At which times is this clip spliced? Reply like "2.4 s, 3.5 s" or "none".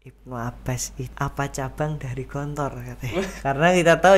1.0 s, 3.4 s